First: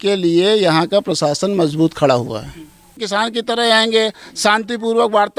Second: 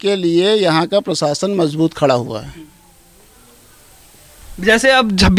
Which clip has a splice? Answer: first; 1 cut; at 3.0 s

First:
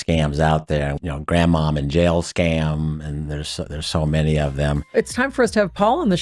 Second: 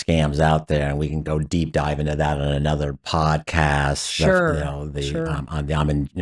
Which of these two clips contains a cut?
first; 1 cut; at 1.0 s

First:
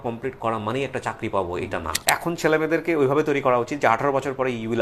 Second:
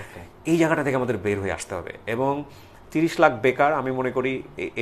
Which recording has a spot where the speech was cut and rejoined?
first; 1 cut; at 1.9 s

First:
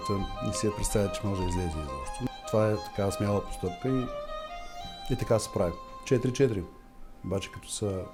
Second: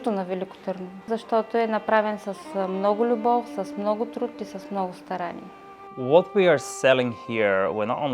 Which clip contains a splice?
second; 2 cuts; at 1.1 s, 5.8 s

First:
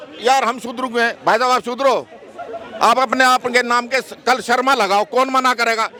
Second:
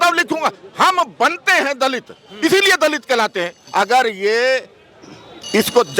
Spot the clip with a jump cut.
second; 1 cut; at 3.6 s

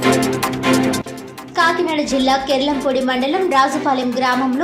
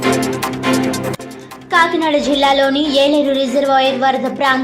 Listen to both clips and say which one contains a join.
second; 2 cuts; at 0.9 s, 1.2 s

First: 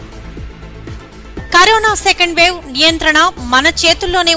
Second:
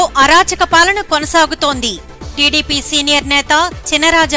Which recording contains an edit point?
first; 1 cut; at 1.0 s

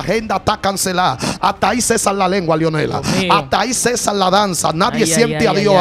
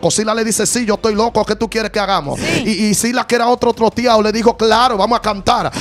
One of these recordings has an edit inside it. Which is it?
second; 1 cut; at 2.4 s

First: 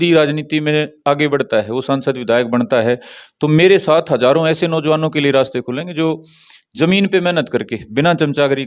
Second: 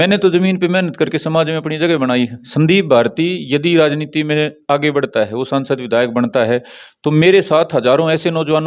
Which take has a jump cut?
second; 1 cut; at 2.4 s

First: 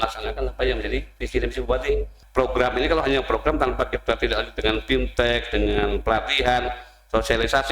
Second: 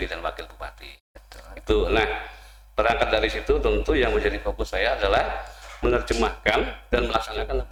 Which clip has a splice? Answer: first; 1 cut; at 2.2 s

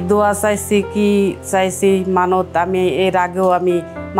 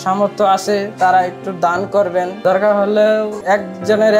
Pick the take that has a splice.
second; 2 cuts; at 2.3 s, 3.3 s

